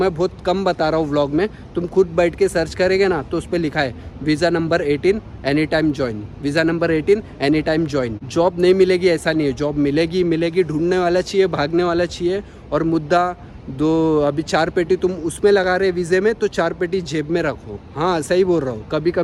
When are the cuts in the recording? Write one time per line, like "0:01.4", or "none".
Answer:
none